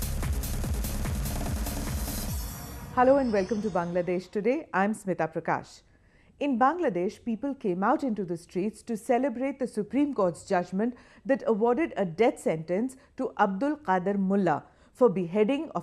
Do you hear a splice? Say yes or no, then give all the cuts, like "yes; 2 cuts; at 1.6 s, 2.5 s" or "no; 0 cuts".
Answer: yes; 2 cuts; at 2.9 s, 11.7 s